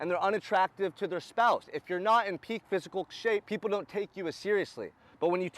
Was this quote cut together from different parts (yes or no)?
yes